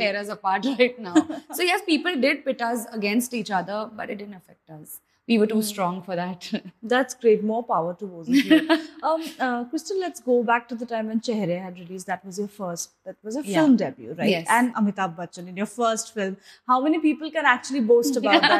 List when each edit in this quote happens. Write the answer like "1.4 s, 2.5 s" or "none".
none